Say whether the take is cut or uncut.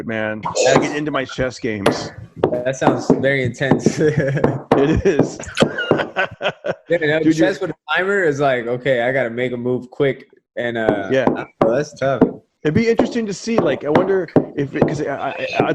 uncut